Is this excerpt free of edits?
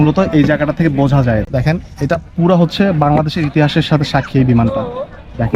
no; 1 cut; at 1.4 s

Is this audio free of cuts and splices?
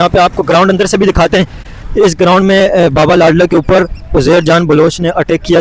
yes; 0 cuts

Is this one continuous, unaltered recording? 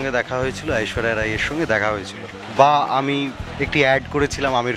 no; 2 cuts; at 2.3 s, 3.4 s

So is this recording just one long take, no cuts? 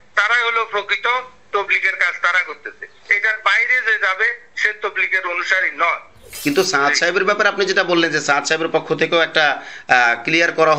no; 1 cut; at 6.2 s

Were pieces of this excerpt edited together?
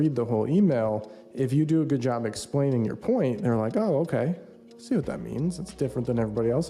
no; 0 cuts

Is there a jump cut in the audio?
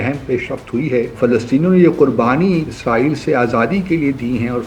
yes; 2 cuts; at 1.1 s, 2.7 s

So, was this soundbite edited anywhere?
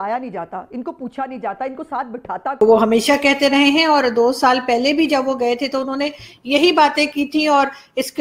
yes; 1 cut; at 2.6 s

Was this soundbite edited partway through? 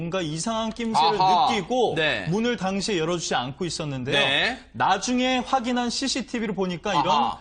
yes; 1 cut; at 1.4 s

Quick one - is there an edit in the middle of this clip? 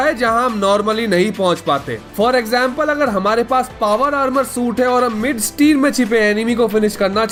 no; 0 cuts

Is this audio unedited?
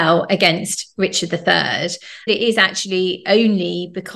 no; 1 cut; at 2.3 s

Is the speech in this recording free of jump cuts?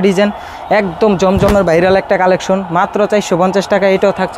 yes; 0 cuts

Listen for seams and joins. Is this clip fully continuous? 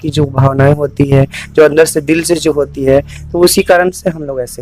yes; 0 cuts

